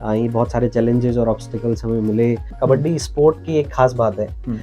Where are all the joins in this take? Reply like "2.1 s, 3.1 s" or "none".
2.5 s